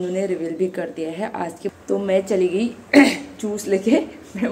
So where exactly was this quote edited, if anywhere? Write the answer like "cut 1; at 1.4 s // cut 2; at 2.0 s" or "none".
cut 1; at 1.8 s